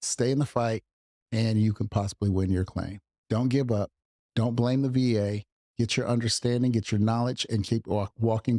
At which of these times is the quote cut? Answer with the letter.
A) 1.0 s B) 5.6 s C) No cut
C